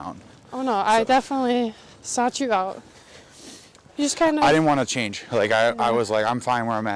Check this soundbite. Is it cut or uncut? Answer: cut